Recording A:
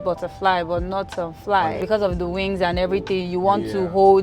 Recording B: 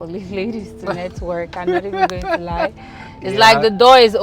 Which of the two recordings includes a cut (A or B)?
A